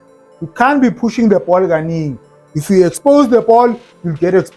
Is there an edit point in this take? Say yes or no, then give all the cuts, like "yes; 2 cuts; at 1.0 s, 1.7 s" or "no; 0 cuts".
no; 0 cuts